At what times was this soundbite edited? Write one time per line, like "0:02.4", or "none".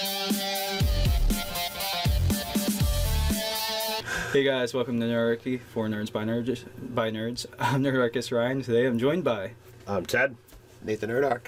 none

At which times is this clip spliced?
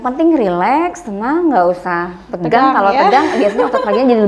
none

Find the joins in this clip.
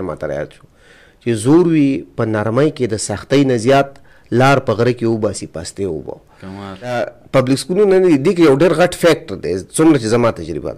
0:07.0

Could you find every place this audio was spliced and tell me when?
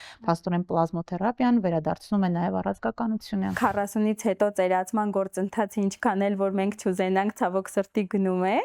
0:03.5

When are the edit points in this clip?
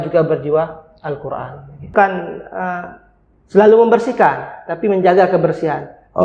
0:01.9

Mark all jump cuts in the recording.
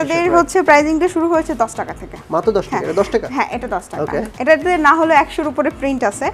none

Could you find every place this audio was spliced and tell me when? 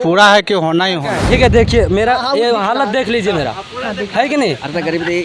0:01.2

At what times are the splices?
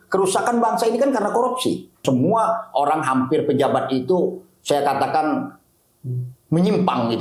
0:02.0

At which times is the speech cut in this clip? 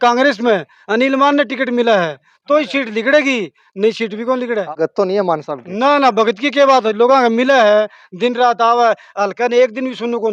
none

